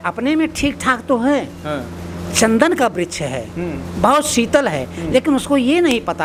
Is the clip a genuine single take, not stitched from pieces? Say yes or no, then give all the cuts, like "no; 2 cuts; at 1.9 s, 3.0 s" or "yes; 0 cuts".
yes; 0 cuts